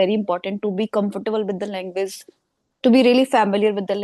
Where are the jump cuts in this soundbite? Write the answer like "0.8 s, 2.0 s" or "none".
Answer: none